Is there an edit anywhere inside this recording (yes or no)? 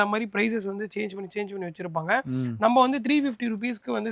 no